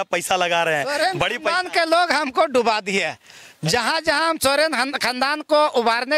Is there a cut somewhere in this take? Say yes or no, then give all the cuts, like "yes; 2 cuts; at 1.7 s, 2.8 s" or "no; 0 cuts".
no; 0 cuts